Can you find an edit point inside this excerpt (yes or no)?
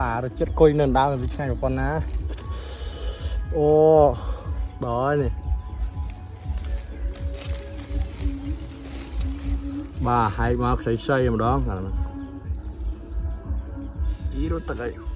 no